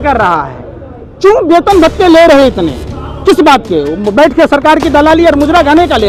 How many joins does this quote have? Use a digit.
0